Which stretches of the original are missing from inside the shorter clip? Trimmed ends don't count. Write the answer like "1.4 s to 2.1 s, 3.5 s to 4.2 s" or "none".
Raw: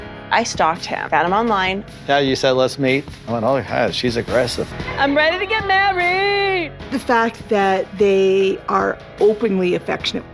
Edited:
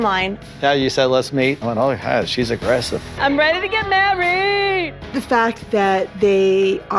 3.1 s to 3.3 s, 4.7 s to 4.8 s